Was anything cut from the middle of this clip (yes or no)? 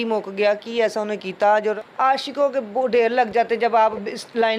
yes